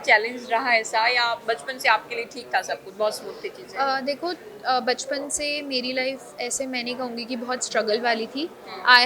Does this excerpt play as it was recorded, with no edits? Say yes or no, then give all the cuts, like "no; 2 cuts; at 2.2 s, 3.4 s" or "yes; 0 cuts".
yes; 0 cuts